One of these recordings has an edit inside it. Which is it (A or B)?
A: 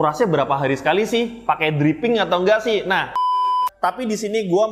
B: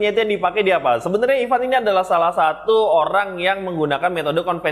A